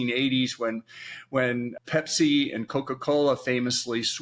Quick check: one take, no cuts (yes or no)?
no